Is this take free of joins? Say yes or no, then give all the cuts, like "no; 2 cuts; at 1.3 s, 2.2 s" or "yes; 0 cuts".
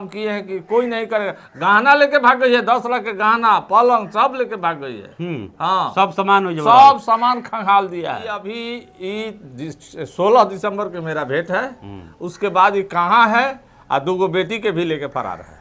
no; 1 cut; at 8.4 s